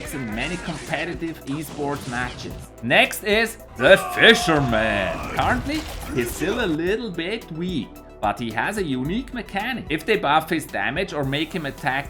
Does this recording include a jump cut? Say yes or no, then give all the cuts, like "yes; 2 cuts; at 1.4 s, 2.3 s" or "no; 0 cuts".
no; 0 cuts